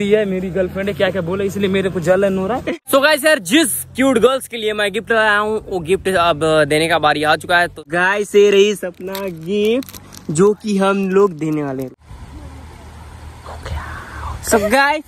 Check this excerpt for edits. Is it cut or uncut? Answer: cut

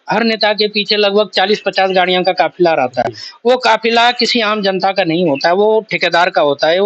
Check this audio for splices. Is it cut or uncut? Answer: uncut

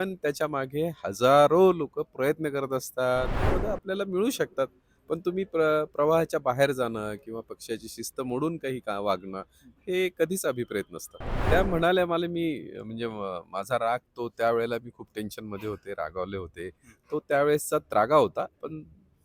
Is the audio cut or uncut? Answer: cut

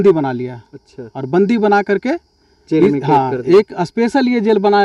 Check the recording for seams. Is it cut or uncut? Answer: uncut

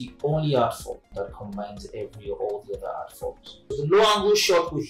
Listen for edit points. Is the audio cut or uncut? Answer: cut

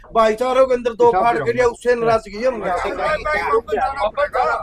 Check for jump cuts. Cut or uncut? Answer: cut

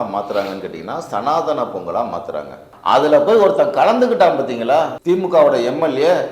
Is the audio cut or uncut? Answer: cut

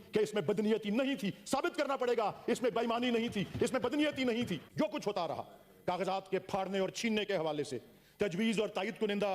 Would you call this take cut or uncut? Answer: cut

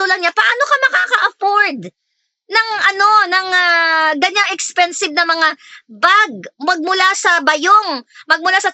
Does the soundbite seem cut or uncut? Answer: uncut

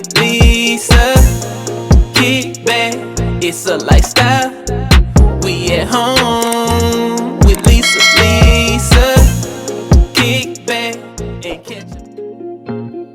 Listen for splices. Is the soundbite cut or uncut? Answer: cut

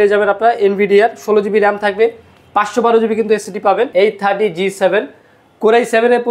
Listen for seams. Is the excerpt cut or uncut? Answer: cut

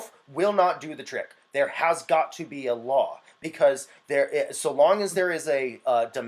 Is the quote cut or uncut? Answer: uncut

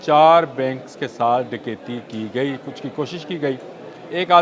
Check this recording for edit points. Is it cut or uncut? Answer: uncut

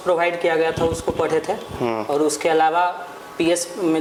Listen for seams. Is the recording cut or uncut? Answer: uncut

